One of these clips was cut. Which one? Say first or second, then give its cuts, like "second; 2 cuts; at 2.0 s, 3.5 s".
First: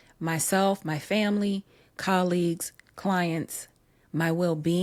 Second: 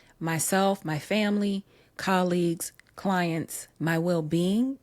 second; 1 cut; at 3.6 s